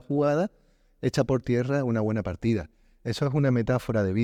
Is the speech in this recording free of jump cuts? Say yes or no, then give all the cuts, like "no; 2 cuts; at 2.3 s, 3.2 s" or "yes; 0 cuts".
yes; 0 cuts